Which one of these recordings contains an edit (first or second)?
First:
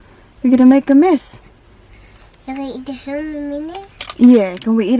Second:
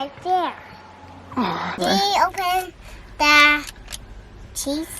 second